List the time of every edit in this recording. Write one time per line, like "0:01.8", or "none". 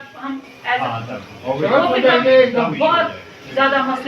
none